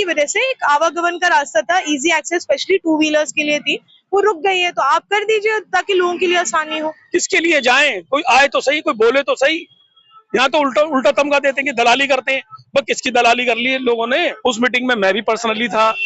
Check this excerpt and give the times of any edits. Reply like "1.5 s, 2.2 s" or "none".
7.0 s, 14.3 s